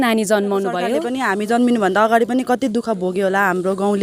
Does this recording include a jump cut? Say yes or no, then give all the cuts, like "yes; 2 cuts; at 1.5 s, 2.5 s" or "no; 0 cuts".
yes; 1 cut; at 1.0 s